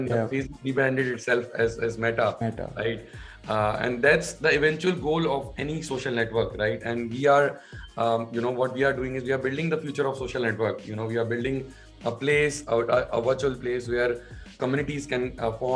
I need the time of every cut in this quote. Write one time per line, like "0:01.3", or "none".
0:14.6